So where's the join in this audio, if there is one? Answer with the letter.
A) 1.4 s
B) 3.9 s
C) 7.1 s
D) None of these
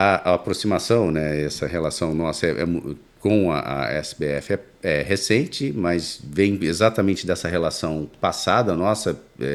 D